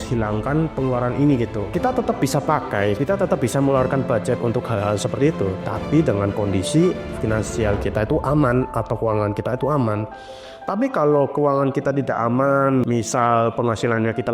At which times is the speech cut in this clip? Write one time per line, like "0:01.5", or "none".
0:01.6
0:03.0